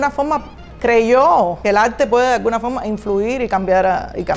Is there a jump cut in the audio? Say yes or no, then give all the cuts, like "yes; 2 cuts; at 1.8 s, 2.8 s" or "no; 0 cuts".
yes; 1 cut; at 1.6 s